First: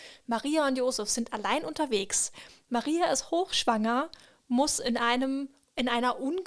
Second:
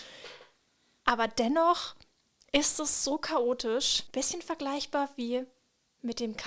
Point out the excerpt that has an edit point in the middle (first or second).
second